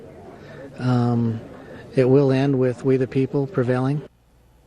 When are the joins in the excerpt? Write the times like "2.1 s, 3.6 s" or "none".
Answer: 2.4 s